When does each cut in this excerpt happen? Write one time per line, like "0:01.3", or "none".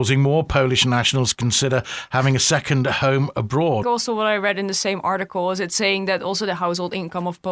0:03.8